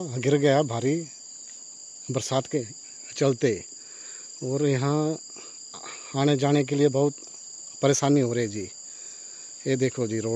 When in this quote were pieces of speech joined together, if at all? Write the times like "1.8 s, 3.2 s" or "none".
none